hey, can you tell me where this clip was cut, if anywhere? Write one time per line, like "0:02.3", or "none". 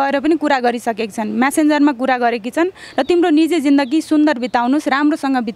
none